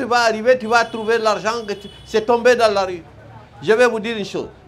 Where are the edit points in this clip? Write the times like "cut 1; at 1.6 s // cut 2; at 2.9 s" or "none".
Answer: none